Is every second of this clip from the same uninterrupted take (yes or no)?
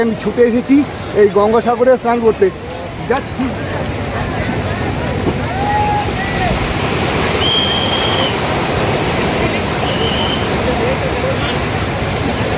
yes